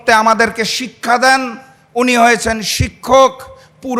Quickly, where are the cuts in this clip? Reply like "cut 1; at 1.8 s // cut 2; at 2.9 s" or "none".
none

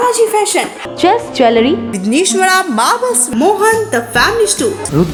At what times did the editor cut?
none

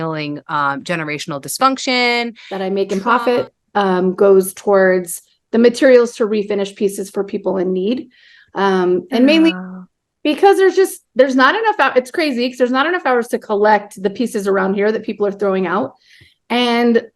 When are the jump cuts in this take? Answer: cut 1; at 2.4 s

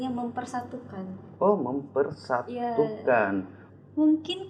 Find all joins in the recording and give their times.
cut 1; at 3.6 s

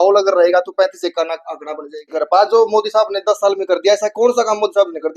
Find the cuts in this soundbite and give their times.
cut 1; at 2.2 s

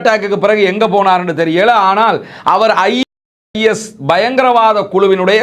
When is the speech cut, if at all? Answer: none

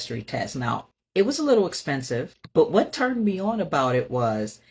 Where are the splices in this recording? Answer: cut 1; at 0.9 s // cut 2; at 2.4 s

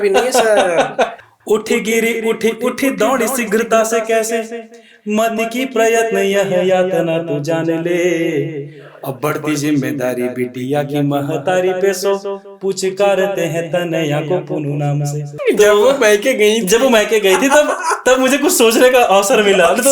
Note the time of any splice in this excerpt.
cut 1; at 1.3 s // cut 2; at 15.4 s

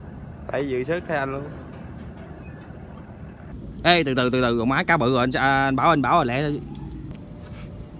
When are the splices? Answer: cut 1; at 3.5 s // cut 2; at 7.1 s

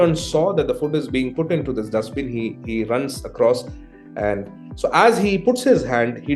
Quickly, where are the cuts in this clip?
none

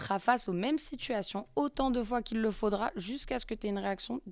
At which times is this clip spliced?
none

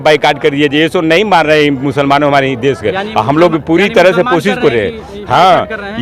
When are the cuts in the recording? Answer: none

